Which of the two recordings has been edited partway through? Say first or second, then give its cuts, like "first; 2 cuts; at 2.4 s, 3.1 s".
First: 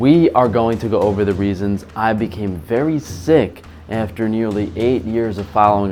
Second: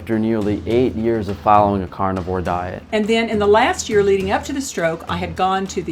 second; 1 cut; at 2.8 s